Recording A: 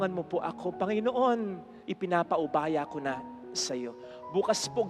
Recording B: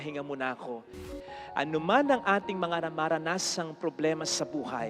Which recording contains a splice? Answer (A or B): B